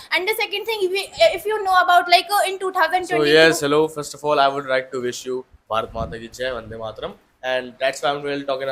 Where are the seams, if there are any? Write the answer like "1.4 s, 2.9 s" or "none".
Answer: none